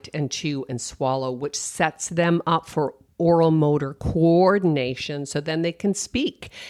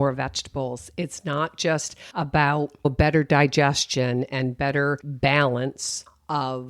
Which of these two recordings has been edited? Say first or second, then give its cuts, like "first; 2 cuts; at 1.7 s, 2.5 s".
second; 3 cuts; at 2.0 s, 2.8 s, 5.1 s